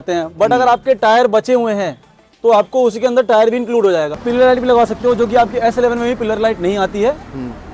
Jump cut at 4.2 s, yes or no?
yes